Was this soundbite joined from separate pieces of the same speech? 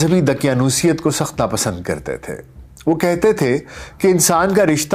no; 0 cuts

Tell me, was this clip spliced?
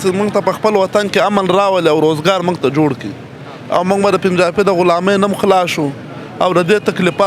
no; 0 cuts

